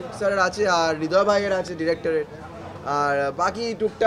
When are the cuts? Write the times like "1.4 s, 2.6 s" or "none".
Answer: none